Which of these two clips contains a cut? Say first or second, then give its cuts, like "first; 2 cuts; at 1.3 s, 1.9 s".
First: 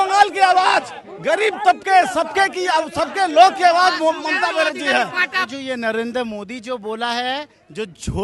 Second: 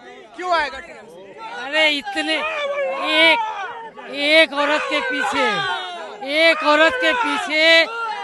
first; 1 cut; at 5.5 s